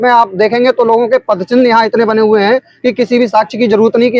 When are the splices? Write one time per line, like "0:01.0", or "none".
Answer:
none